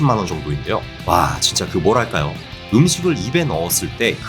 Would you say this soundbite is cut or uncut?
cut